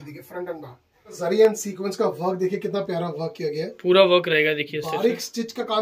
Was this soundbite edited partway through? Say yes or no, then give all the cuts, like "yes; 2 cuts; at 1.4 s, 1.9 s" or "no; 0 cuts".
yes; 1 cut; at 1.2 s